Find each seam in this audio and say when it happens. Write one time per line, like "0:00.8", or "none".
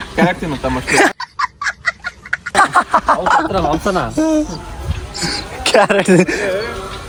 none